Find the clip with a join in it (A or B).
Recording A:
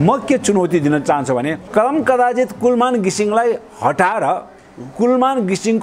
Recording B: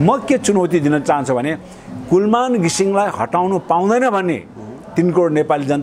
A